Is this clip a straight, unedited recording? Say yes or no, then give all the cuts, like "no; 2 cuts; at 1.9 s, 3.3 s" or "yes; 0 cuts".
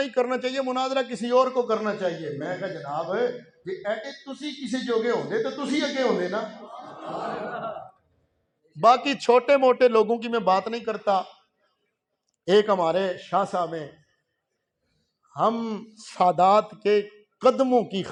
yes; 0 cuts